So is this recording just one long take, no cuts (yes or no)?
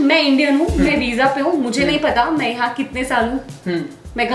yes